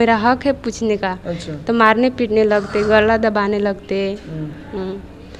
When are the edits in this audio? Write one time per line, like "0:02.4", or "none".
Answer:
none